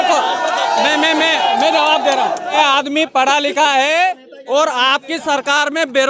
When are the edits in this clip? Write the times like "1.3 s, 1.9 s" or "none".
2.6 s